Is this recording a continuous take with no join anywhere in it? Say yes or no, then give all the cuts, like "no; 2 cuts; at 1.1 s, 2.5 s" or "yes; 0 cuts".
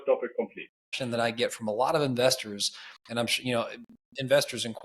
no; 1 cut; at 1.0 s